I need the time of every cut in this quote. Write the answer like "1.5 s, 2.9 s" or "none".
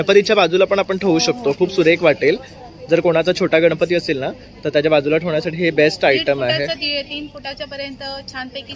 none